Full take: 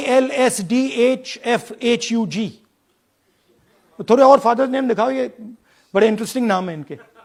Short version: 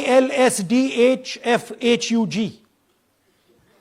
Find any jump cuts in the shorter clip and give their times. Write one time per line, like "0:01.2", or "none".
none